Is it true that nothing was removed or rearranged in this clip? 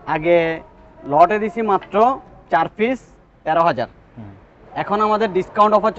yes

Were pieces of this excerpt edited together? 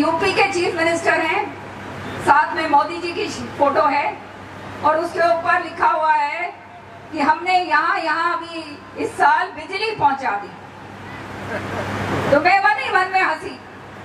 no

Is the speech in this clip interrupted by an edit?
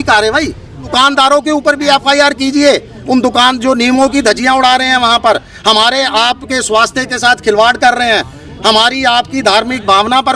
yes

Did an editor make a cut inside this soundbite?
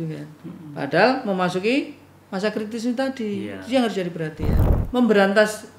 yes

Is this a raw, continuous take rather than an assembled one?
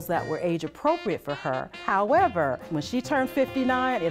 no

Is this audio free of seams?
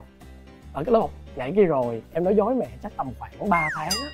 yes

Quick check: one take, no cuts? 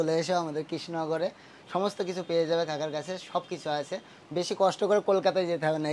yes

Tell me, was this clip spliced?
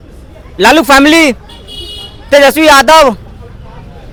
no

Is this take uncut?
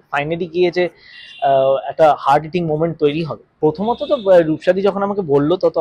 no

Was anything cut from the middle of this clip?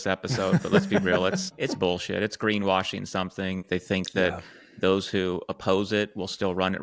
yes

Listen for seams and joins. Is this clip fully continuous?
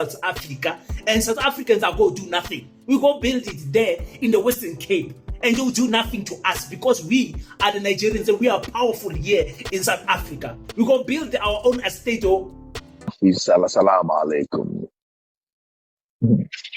no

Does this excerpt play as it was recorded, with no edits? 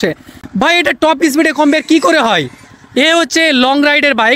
yes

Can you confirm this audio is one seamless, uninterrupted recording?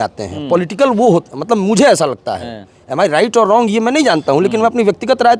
yes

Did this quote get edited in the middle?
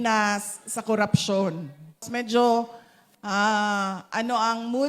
yes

